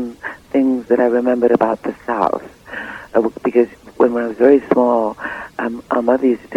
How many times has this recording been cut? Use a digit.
0